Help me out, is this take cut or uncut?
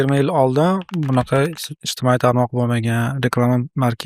cut